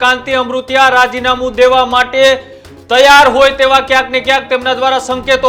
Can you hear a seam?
no; 0 cuts

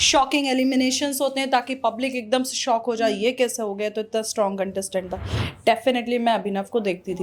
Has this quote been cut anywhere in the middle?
no; 0 cuts

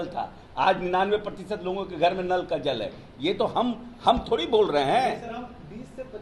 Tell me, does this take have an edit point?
no; 0 cuts

